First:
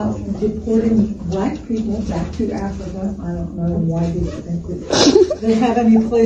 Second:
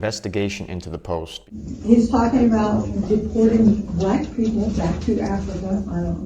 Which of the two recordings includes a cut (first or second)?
second